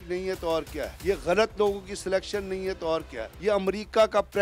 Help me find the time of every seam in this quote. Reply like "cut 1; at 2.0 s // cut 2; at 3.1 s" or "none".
cut 1; at 0.9 s // cut 2; at 3.2 s